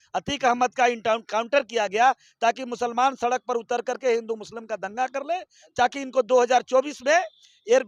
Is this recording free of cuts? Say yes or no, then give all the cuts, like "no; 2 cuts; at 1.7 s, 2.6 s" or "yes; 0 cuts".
yes; 0 cuts